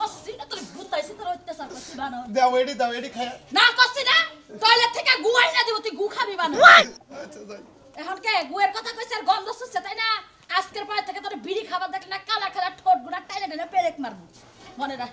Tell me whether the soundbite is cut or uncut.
uncut